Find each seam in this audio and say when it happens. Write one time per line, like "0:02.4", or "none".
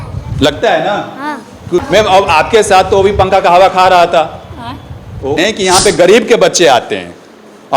0:01.8
0:05.4